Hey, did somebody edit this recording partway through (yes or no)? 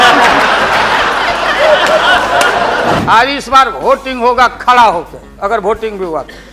yes